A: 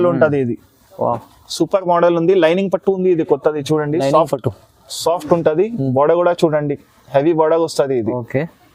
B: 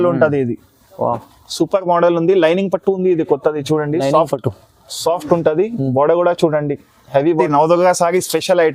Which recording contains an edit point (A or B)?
B